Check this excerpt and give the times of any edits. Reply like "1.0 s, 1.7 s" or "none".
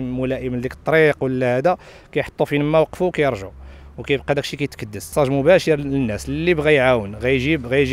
5.1 s